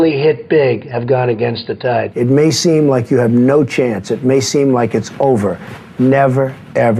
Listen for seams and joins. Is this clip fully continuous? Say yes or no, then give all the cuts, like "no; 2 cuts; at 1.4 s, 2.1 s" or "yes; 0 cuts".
no; 1 cut; at 2.1 s